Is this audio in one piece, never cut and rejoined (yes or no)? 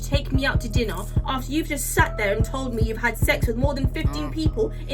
yes